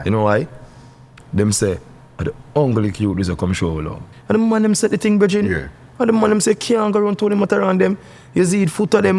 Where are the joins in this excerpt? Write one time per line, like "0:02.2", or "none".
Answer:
0:04.1